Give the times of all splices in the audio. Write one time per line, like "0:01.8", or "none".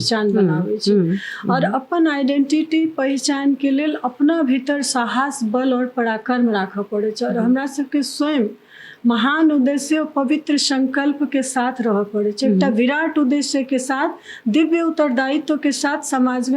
none